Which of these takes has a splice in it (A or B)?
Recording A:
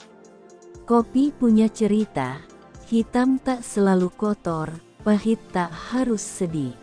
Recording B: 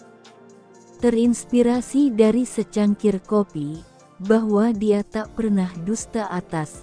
B